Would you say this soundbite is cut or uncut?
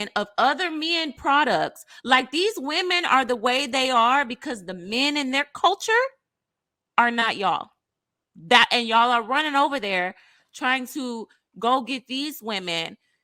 uncut